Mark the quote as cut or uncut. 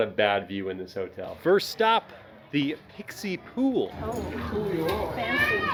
uncut